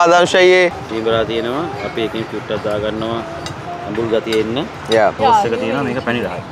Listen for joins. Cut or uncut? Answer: cut